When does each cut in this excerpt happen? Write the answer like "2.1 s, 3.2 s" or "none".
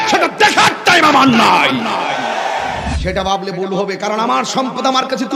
2.9 s